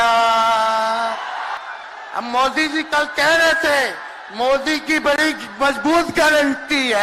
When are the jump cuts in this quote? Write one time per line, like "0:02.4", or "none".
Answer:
0:01.6